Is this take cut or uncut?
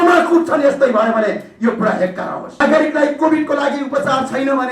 cut